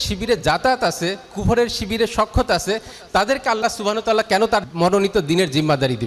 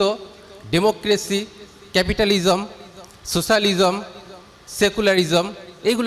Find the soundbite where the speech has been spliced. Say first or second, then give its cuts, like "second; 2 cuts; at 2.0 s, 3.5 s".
first; 1 cut; at 4.7 s